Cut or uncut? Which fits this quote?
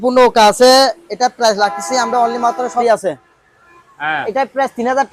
cut